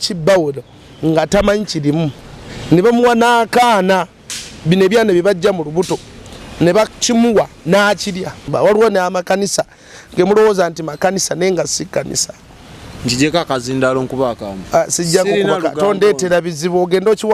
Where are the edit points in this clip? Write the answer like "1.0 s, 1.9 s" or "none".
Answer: 8.5 s